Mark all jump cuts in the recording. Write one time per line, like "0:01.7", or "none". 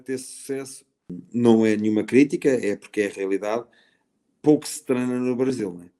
0:01.1